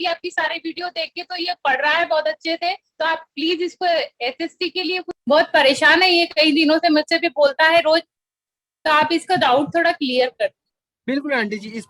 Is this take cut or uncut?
uncut